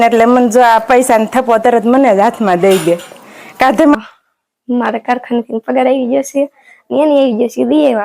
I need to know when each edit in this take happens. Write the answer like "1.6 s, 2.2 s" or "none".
4.0 s